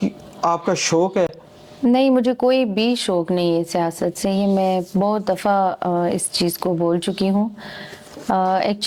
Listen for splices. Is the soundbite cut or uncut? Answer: uncut